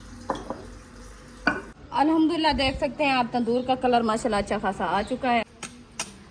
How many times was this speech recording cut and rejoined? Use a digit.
2